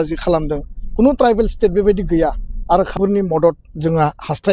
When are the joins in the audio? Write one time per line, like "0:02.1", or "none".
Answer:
0:02.9